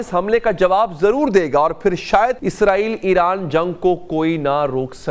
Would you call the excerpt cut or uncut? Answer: cut